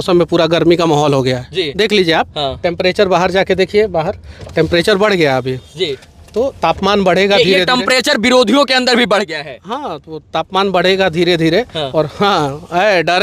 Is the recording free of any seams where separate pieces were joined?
yes; 0 cuts

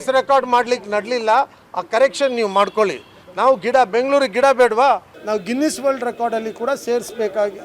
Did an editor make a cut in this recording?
yes; 1 cut; at 5.2 s

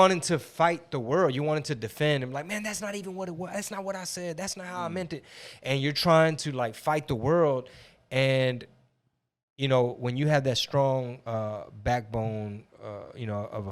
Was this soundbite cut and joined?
no; 0 cuts

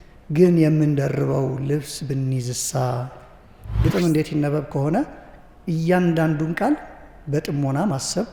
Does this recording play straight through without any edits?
no; 1 cut; at 3.6 s

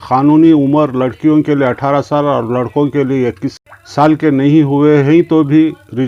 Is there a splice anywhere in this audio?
yes; 1 cut; at 3.5 s

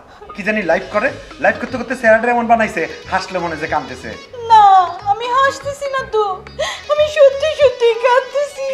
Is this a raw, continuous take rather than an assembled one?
yes; 0 cuts

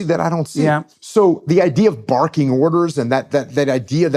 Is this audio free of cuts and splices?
no; 1 cut; at 0.9 s

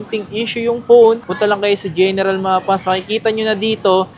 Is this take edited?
no; 0 cuts

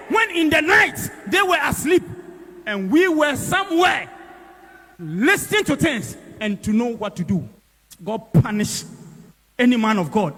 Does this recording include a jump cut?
no; 0 cuts

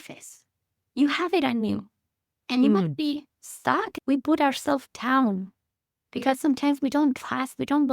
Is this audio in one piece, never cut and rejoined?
no; 1 cut; at 3.9 s

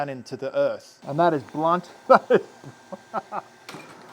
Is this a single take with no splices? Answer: no; 2 cuts; at 1.0 s, 1.9 s

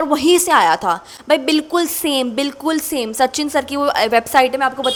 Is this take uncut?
yes; 0 cuts

